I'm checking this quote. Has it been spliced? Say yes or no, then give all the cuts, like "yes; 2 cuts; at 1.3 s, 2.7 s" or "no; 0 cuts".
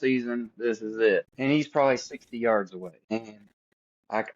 yes; 2 cuts; at 1.3 s, 3.0 s